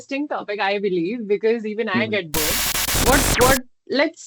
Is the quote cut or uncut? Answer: cut